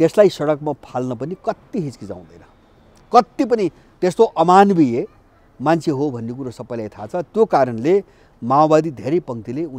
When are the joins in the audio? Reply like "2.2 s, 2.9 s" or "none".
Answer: none